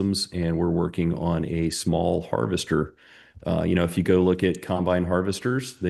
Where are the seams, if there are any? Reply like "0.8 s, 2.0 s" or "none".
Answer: none